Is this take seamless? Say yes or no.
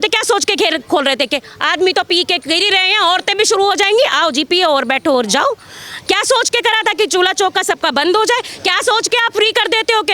yes